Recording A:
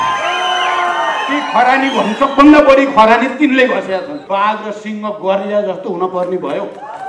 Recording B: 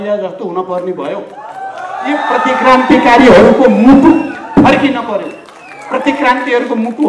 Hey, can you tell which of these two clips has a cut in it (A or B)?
A